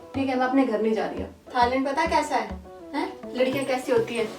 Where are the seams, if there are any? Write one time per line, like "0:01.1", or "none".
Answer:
0:01.5